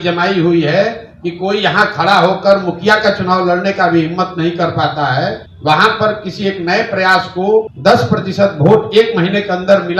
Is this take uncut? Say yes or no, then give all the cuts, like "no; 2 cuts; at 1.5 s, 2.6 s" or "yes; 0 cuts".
no; 2 cuts; at 5.5 s, 7.7 s